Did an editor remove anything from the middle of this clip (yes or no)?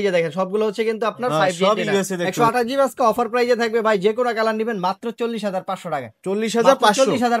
yes